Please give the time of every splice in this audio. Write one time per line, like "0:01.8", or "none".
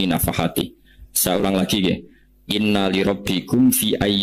none